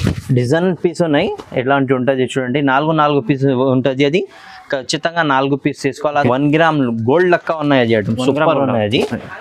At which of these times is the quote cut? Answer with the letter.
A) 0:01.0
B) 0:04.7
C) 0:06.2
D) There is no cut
C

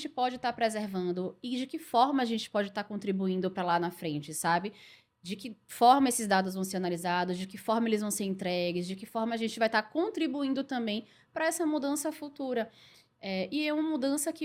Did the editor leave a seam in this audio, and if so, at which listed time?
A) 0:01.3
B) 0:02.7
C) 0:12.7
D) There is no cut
D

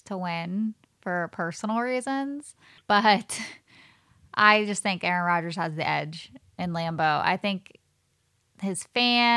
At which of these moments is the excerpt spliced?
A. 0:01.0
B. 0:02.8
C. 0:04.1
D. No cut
B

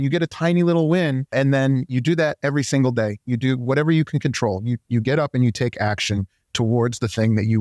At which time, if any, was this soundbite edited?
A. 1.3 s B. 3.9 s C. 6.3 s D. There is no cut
A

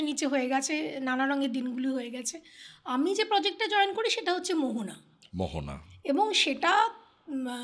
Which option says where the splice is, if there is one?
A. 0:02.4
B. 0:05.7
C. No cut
C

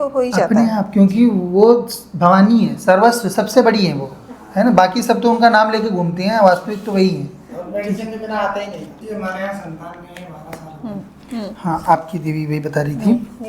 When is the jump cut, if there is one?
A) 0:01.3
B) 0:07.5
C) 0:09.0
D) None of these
C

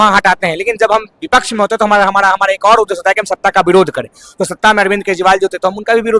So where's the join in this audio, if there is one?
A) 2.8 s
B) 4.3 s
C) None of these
C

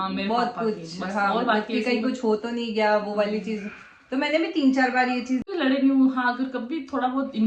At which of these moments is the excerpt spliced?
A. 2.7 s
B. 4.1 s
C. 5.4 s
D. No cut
C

